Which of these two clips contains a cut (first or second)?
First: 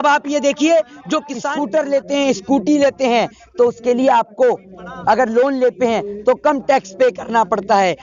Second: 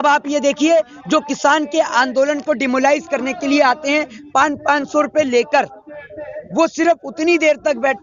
first